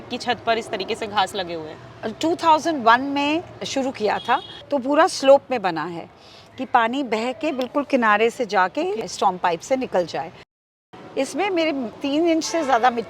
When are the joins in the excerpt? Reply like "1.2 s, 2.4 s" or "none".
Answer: 4.5 s, 9.0 s, 10.7 s, 11.9 s